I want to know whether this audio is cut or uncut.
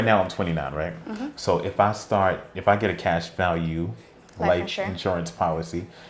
uncut